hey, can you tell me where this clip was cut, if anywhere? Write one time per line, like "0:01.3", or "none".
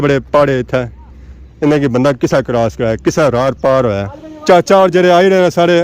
0:04.1

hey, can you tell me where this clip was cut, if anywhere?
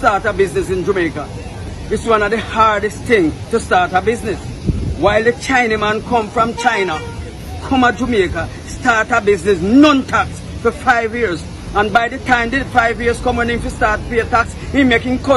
none

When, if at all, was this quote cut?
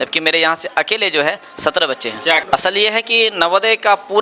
0:02.4

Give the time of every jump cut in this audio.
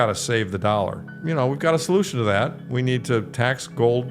0:01.1

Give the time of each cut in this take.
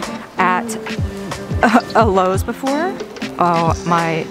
0:03.2

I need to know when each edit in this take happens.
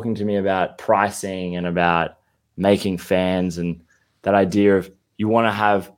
none

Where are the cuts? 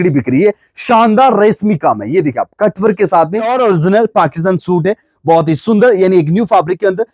0:03.5

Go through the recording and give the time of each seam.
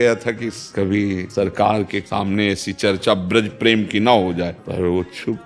0:01.0
0:02.0
0:04.6

